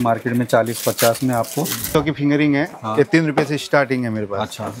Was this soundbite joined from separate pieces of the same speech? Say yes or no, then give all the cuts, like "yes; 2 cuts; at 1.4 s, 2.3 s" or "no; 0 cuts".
yes; 1 cut; at 1.9 s